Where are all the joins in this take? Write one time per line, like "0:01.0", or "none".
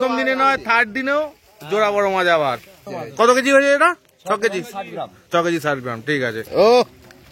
0:03.2
0:06.2